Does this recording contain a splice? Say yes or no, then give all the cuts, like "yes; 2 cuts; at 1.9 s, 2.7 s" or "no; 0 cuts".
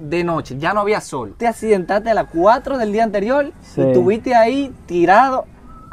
yes; 1 cut; at 1.3 s